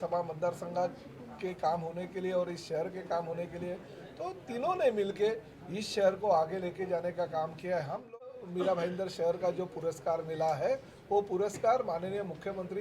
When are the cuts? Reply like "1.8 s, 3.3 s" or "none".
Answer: 8.3 s